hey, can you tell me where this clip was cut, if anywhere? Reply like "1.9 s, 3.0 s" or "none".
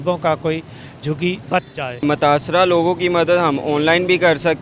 2.0 s